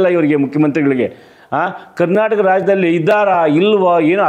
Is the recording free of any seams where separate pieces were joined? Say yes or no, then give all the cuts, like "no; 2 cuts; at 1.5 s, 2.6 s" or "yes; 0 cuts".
yes; 0 cuts